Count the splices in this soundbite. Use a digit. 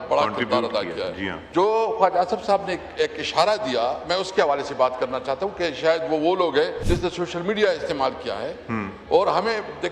2